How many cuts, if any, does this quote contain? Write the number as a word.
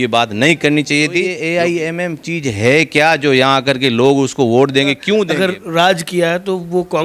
two